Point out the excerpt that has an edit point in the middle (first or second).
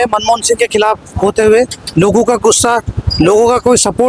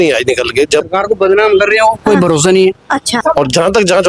second